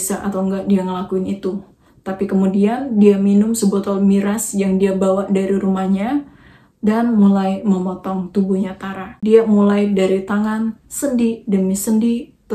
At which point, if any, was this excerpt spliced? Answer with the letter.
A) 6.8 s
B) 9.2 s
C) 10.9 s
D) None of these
B